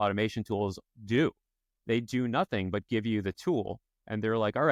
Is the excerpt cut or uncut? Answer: uncut